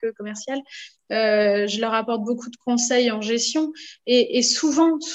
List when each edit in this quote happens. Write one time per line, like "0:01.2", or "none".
none